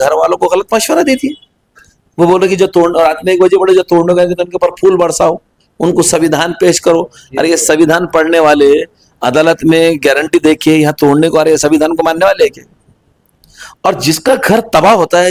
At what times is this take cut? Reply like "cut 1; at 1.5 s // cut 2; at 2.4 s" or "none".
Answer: none